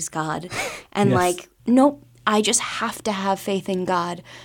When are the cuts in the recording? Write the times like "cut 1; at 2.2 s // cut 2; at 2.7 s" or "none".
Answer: cut 1; at 1.5 s